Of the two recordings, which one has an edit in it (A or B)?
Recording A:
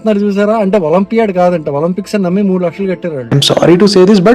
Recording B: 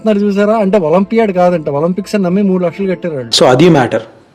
A